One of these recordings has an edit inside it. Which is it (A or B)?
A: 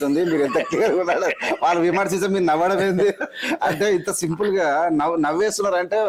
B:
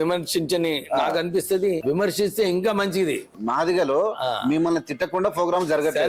B